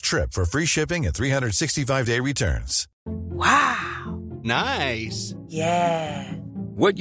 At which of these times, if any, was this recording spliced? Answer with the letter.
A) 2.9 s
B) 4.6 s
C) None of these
A